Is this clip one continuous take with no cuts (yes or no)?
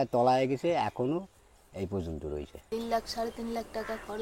no